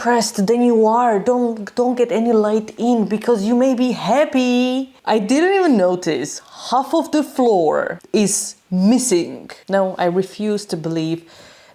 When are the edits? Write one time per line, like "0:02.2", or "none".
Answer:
0:04.9
0:08.0
0:09.5